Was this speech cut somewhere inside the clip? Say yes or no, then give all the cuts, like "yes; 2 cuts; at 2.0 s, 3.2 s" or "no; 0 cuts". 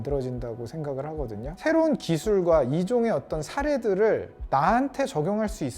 yes; 1 cut; at 1.6 s